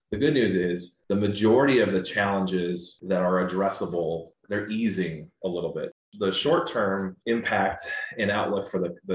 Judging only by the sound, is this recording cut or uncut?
cut